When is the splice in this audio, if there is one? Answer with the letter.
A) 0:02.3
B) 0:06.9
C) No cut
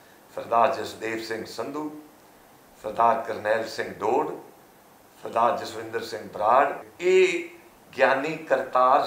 B